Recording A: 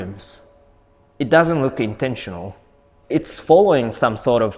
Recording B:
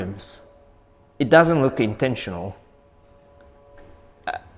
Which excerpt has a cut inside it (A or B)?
A